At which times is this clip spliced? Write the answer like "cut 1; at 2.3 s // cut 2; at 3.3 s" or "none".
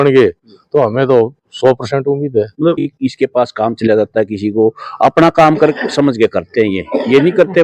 cut 1; at 2.9 s